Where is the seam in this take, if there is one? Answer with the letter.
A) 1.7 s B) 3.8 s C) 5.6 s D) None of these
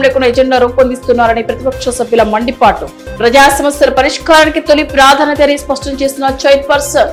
D